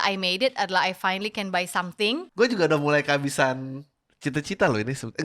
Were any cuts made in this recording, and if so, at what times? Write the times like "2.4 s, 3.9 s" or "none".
2.3 s